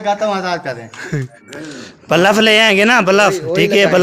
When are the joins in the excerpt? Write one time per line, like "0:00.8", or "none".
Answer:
0:01.4